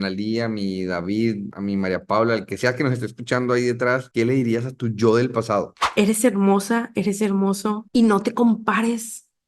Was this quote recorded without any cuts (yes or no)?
no